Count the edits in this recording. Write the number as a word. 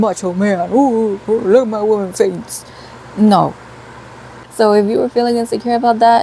one